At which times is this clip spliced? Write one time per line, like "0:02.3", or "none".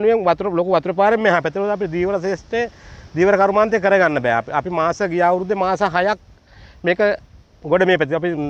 none